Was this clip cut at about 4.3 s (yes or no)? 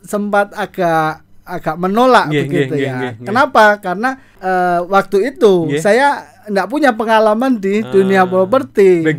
yes